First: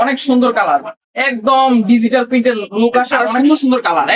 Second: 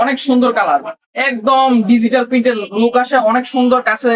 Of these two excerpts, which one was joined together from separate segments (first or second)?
first